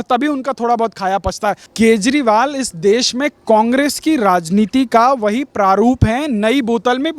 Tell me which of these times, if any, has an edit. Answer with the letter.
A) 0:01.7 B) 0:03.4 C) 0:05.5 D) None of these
A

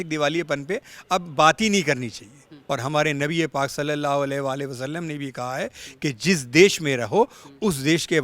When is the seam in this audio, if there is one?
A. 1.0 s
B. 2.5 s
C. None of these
B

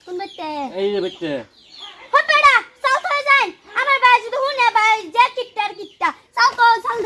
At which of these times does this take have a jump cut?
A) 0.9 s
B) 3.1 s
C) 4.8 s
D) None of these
D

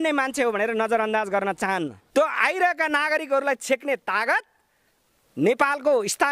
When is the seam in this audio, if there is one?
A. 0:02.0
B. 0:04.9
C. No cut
A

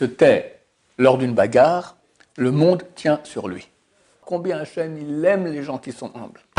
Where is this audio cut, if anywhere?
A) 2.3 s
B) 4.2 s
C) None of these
B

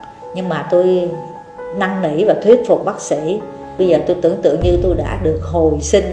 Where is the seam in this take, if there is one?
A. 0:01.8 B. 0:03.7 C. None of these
B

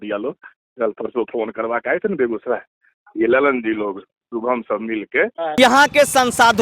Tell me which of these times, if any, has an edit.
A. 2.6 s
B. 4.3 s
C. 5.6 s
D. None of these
C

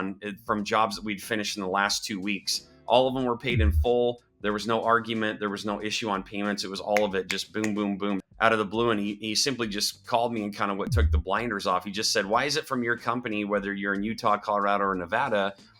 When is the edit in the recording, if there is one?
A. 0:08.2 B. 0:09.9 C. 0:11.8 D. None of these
A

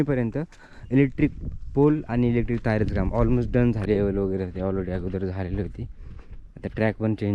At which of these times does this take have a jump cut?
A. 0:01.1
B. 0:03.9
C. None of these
B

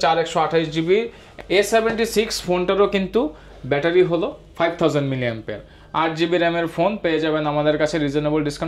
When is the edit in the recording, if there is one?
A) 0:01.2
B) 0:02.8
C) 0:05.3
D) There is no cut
A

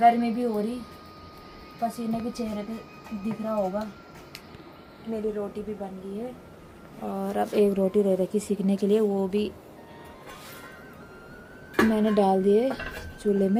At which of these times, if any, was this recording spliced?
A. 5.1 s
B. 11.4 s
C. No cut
C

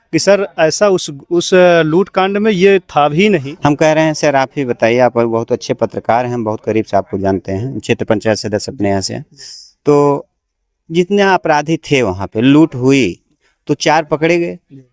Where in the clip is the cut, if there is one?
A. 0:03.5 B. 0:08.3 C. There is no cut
A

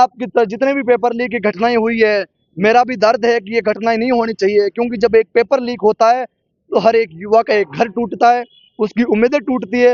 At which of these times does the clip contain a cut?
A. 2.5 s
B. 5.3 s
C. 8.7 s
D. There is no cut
D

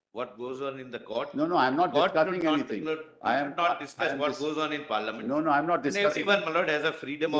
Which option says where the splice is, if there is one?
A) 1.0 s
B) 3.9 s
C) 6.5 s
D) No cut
D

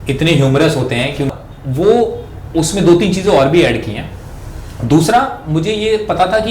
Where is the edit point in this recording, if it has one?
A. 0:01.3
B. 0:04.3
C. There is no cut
A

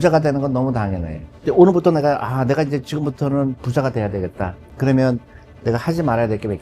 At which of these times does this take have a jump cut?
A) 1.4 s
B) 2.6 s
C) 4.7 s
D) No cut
A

